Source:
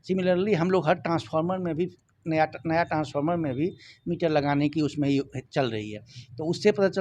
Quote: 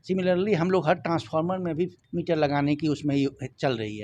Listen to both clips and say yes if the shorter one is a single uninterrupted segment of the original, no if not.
no